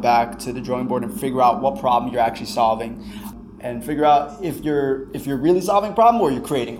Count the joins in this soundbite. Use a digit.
1